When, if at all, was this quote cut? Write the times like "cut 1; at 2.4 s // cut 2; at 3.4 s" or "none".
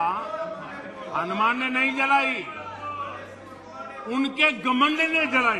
none